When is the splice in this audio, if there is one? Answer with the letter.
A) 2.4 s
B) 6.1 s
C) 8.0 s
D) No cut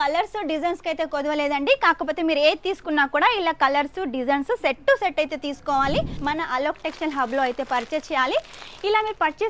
B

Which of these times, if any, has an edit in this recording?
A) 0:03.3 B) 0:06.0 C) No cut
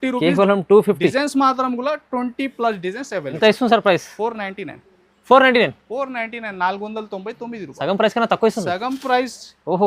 A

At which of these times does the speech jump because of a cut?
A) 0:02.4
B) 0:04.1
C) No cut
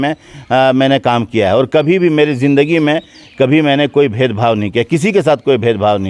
C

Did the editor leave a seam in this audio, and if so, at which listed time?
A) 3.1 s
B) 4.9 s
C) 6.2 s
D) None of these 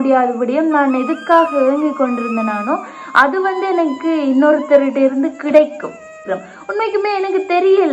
C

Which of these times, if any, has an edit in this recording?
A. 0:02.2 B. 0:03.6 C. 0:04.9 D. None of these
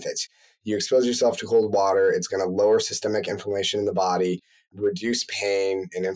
D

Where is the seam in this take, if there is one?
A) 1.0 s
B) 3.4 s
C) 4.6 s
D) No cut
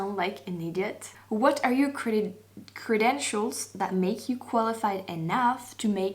A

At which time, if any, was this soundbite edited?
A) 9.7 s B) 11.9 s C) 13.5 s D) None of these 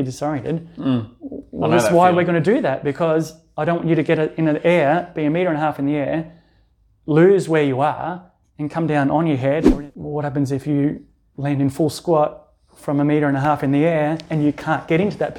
A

